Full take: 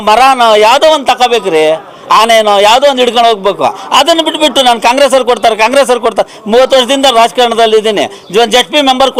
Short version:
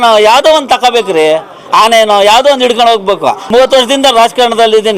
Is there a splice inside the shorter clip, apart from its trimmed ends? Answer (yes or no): yes